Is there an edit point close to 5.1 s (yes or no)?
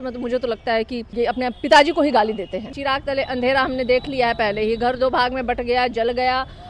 no